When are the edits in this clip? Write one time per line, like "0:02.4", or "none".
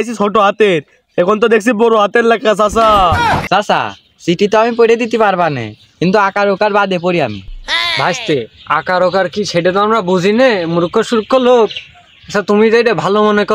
0:03.4